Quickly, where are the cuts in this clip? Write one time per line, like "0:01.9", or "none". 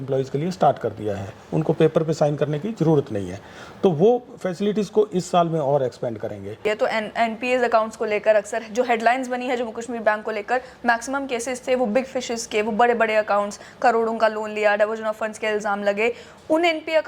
0:06.5